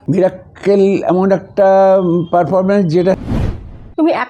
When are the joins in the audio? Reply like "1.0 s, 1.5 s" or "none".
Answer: 3.3 s